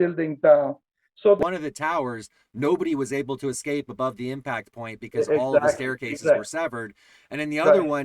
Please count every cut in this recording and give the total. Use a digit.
1